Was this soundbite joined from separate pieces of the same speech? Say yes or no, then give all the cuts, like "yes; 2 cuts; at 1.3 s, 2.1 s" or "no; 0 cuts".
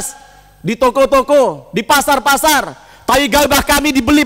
no; 0 cuts